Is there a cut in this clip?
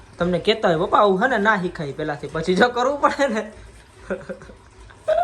no; 0 cuts

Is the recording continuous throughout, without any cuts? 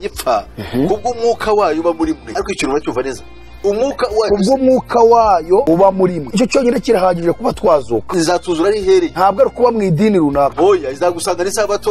yes; 0 cuts

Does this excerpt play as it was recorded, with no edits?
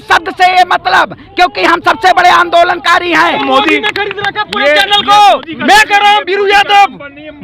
no; 1 cut; at 3.5 s

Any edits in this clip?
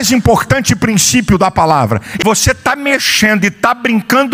yes; 1 cut; at 2.1 s

